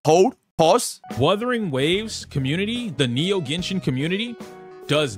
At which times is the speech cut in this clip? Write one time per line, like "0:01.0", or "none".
0:01.0

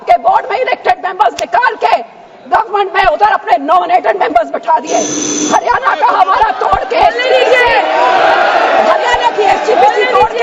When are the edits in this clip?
none

